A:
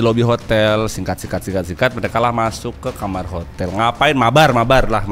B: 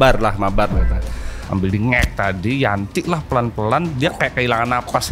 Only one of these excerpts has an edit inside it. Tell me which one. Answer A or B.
B